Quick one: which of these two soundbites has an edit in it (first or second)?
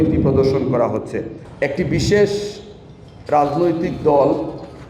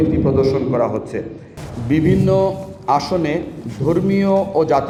first